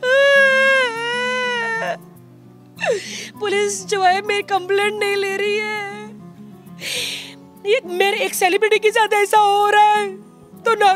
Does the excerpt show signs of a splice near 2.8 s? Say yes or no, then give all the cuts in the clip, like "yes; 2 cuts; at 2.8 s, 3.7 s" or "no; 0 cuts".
no; 0 cuts